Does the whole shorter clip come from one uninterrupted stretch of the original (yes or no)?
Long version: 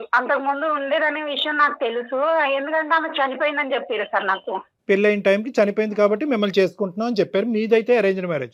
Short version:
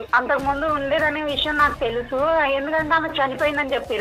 yes